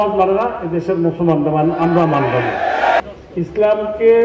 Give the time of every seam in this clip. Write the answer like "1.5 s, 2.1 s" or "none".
3.0 s